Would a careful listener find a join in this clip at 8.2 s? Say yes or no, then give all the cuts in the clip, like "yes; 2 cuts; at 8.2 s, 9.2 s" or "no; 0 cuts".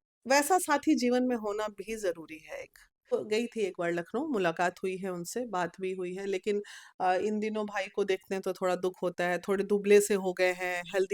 no; 1 cut; at 3.1 s